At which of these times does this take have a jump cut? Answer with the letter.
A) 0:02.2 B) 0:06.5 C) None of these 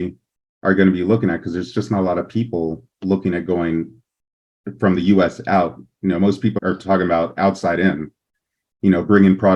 B